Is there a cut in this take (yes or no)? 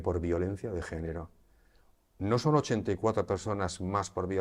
no